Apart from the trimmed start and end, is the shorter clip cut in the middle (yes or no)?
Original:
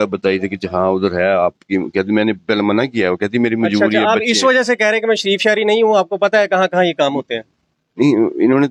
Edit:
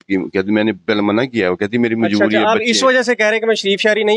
no